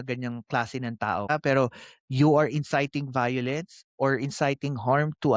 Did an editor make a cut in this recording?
yes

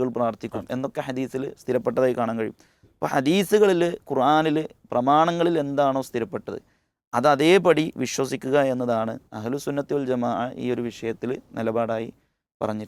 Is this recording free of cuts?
yes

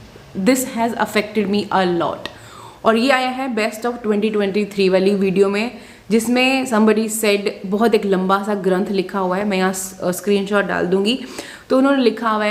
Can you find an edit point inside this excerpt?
no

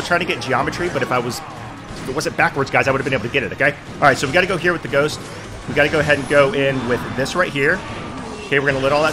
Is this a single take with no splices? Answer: yes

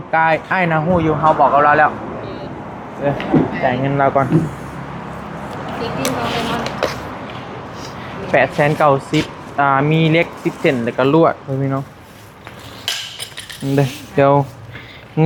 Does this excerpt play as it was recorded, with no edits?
yes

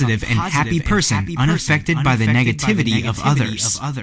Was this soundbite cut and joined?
no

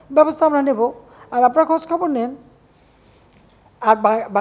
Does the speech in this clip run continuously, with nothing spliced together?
yes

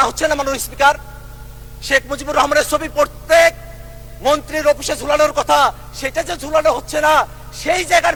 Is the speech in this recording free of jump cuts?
yes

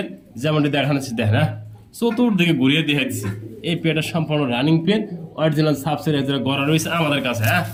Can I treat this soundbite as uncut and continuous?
yes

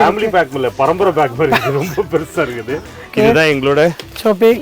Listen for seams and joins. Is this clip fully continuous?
no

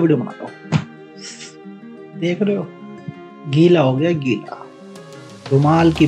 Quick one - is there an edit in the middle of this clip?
no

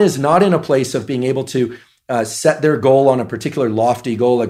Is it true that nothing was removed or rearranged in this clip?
yes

